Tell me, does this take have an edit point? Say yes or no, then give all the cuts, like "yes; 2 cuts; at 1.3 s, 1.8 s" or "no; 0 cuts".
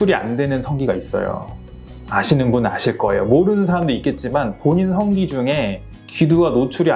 no; 0 cuts